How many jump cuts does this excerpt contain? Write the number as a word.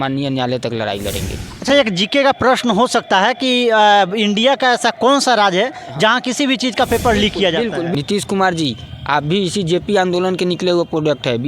two